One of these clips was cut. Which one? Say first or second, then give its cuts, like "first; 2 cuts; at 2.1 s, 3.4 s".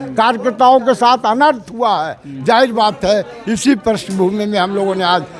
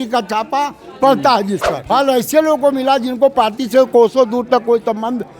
second; 1 cut; at 1.7 s